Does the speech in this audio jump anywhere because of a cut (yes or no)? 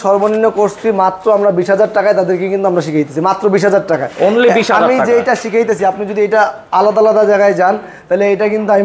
no